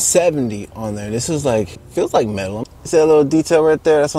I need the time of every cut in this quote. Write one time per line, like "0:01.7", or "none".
0:01.8
0:02.7